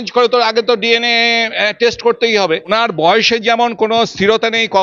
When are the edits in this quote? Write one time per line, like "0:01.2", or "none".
0:02.7